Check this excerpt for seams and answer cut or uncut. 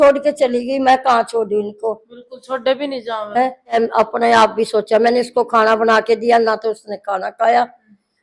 cut